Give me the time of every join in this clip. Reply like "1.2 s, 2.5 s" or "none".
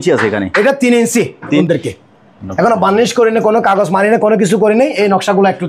1.6 s